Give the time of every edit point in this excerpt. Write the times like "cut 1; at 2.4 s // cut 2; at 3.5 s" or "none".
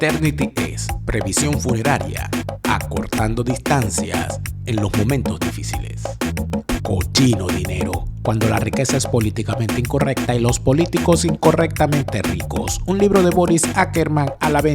cut 1; at 6.7 s

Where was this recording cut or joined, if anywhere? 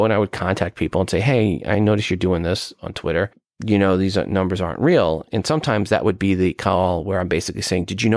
cut 1; at 3.5 s // cut 2; at 5.3 s

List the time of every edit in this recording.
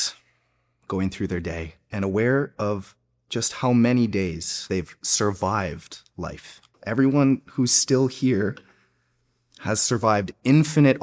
cut 1; at 1.8 s // cut 2; at 4.6 s // cut 3; at 6.8 s

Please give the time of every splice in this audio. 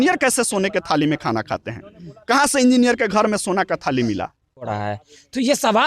cut 1; at 4.7 s

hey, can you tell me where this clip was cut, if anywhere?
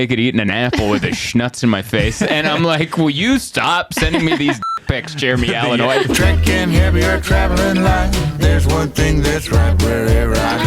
cut 1; at 6.1 s

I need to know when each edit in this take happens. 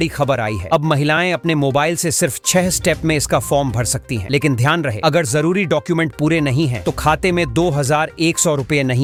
none

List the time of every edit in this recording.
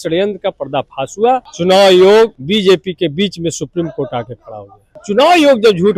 cut 1; at 1.5 s // cut 2; at 2.4 s // cut 3; at 5.0 s

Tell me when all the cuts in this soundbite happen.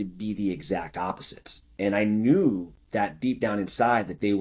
none

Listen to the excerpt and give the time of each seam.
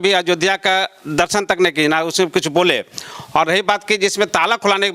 none

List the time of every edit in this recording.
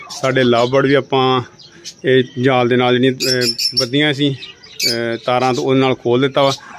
none

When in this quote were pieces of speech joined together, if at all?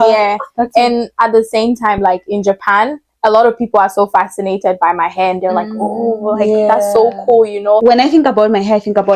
cut 1; at 7.8 s

